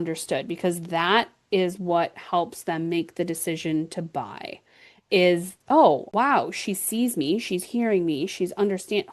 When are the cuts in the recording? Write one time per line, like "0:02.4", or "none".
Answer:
0:06.1

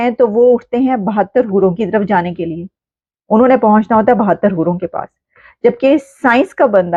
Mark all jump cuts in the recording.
none

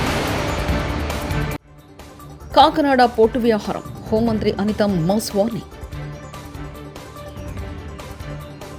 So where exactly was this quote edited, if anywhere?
none

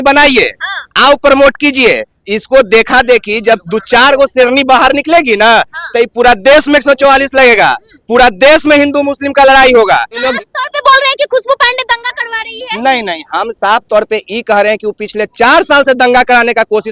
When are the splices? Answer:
0:10.3

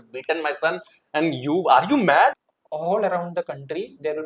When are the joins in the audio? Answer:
0:02.4

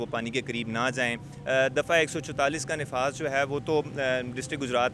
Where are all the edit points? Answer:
none

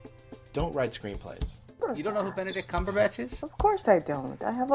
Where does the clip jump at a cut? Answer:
0:01.7

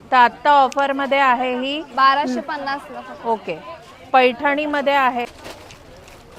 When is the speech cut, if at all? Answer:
0:05.3

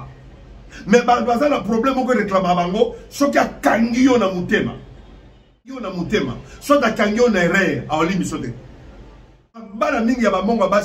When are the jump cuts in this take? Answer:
0:05.9
0:09.7

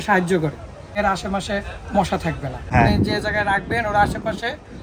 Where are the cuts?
0:00.9
0:02.7

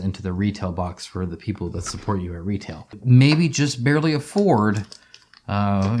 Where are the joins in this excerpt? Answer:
0:02.9

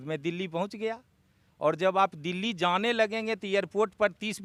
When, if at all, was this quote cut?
none

